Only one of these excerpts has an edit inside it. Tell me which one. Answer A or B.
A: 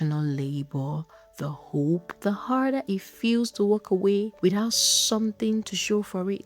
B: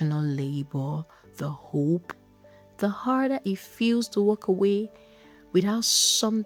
A